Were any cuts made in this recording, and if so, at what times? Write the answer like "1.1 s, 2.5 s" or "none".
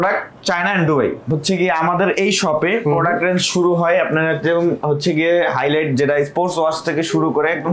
1.2 s